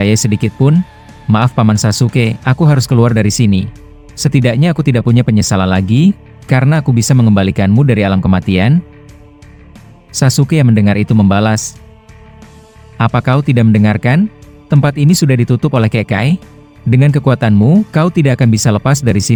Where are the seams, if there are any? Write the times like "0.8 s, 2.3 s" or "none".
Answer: none